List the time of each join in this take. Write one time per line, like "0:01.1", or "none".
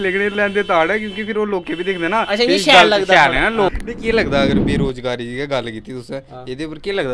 0:03.7